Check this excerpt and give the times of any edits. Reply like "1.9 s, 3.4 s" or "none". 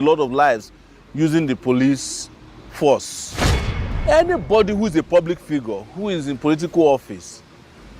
3.7 s